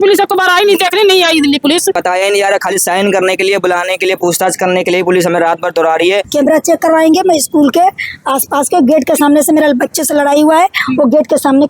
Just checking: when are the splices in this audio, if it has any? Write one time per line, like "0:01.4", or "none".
0:02.0
0:06.3